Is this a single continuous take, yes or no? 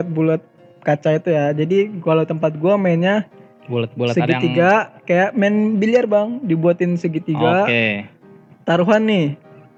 yes